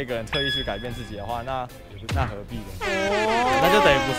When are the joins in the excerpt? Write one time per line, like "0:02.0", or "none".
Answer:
none